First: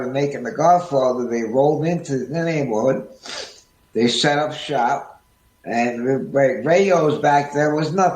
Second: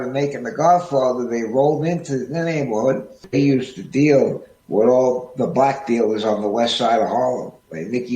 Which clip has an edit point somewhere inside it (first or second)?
second